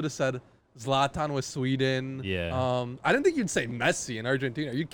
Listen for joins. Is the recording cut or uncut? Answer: uncut